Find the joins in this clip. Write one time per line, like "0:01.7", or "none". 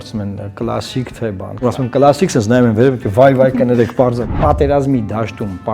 0:01.5
0:04.3